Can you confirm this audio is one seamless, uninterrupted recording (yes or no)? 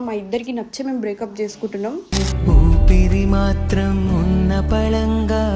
yes